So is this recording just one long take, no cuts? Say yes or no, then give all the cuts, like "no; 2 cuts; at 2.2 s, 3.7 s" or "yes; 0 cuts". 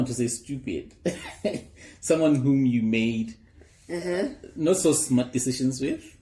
yes; 0 cuts